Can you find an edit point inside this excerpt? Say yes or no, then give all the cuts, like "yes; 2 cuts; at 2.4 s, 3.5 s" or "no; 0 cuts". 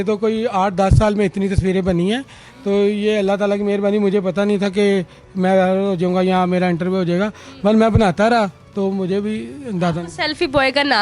no; 0 cuts